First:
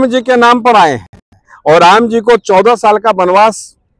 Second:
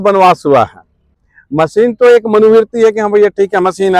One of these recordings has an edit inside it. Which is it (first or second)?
second